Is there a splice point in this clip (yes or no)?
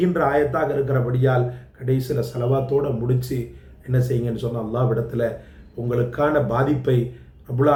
no